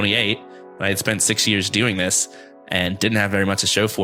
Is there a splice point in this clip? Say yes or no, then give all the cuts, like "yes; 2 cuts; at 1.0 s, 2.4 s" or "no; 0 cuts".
no; 0 cuts